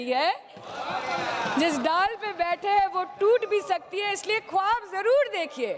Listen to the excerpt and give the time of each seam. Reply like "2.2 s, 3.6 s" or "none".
none